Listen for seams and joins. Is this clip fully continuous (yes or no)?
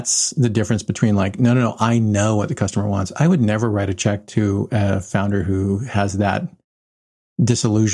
yes